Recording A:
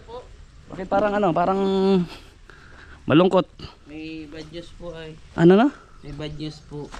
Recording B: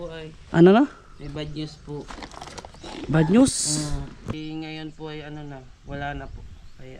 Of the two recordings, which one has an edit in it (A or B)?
B